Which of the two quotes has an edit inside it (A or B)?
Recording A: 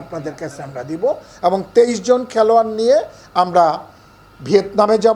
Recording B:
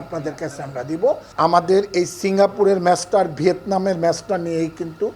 B